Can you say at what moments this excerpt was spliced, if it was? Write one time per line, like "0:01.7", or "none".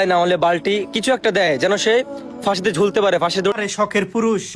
0:03.6